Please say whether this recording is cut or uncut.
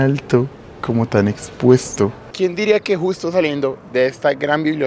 cut